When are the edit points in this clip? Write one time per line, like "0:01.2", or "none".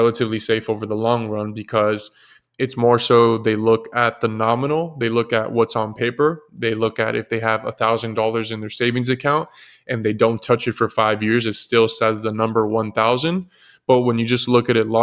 none